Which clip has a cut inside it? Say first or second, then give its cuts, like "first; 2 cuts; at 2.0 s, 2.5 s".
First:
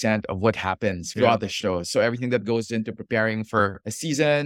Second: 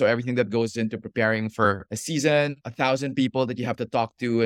first; 1 cut; at 1.0 s